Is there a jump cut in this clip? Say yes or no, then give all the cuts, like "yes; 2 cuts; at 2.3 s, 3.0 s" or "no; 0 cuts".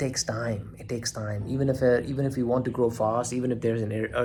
no; 0 cuts